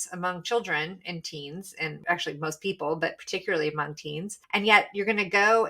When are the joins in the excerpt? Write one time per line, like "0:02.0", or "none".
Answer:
0:02.0
0:04.3